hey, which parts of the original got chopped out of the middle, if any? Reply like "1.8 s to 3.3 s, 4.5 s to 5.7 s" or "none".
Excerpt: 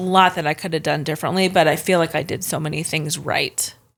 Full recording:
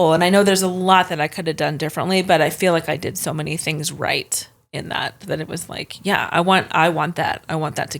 none